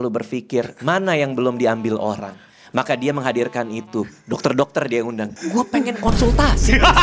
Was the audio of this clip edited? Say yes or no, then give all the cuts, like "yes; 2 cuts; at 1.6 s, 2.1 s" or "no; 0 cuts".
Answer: yes; 1 cut; at 5.4 s